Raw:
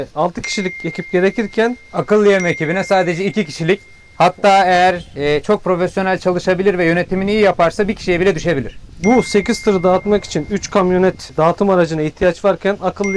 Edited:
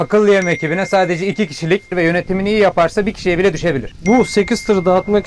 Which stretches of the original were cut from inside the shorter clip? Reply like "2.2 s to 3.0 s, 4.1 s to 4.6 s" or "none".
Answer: 3.9 s to 6.8 s, 8.7 s to 8.9 s